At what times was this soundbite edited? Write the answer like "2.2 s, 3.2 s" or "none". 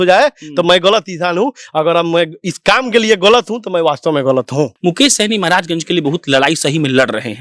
4.7 s